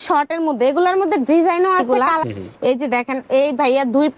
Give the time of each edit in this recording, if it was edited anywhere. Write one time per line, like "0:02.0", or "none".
0:02.0